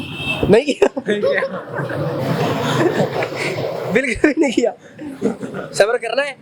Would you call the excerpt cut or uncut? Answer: uncut